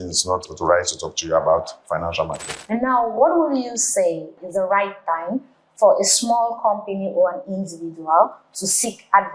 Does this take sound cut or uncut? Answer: cut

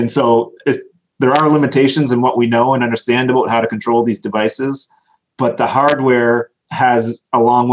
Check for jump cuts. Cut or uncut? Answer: uncut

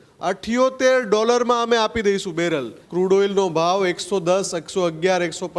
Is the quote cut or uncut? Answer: cut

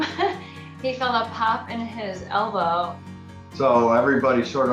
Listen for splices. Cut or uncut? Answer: cut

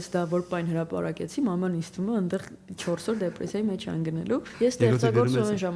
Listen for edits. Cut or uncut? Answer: cut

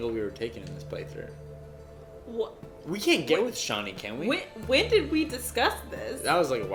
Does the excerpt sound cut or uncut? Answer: uncut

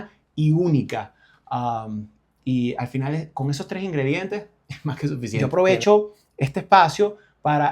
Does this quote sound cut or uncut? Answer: cut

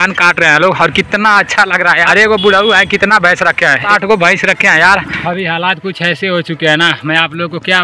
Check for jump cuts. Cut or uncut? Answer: cut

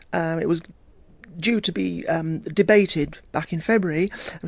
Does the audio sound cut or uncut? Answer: cut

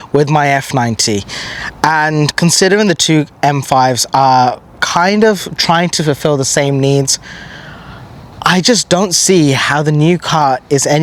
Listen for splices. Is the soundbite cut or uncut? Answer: uncut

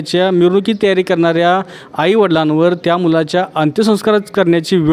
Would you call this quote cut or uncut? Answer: uncut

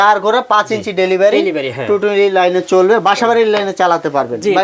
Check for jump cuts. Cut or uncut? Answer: uncut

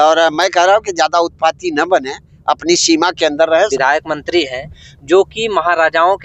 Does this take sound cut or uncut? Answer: cut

